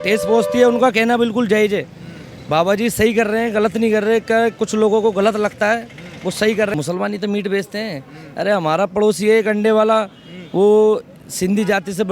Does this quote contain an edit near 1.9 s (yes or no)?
no